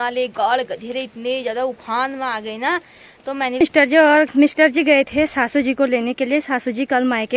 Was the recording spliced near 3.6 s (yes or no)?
yes